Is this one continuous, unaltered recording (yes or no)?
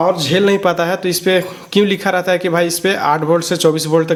yes